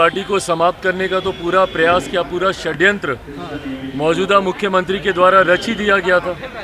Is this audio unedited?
yes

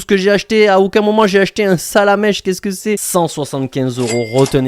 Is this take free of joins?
no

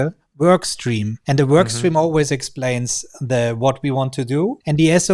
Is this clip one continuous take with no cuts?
no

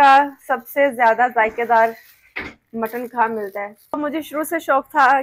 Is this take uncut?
no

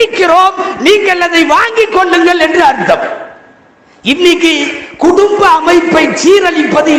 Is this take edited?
no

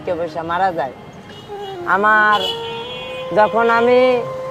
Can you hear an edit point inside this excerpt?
no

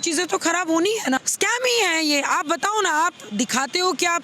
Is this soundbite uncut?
no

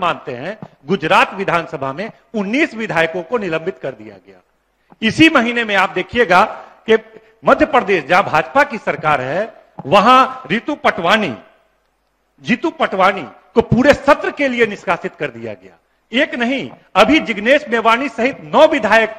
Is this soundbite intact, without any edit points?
yes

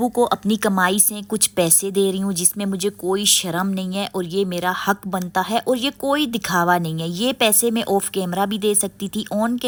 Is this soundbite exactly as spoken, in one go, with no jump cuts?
yes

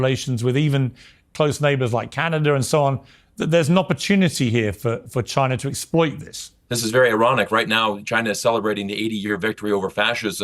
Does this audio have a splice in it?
yes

